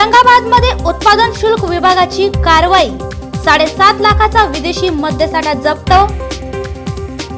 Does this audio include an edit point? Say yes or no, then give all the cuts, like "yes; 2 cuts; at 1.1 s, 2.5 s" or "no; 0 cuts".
no; 0 cuts